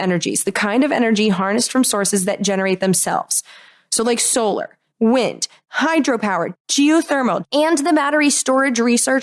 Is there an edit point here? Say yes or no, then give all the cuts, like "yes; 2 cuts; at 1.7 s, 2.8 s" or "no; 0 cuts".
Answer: yes; 4 cuts; at 4.8 s, 5.5 s, 6.5 s, 7.4 s